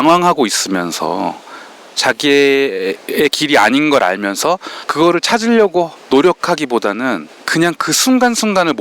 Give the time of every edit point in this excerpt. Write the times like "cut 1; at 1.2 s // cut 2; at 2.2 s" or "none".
cut 1; at 4.8 s // cut 2; at 7.3 s